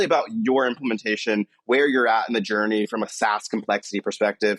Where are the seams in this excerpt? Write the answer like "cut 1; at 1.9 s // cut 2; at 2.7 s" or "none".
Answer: cut 1; at 3.1 s